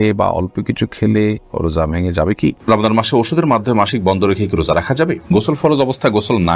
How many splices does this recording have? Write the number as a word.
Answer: two